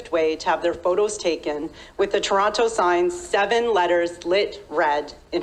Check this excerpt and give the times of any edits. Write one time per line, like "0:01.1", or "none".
none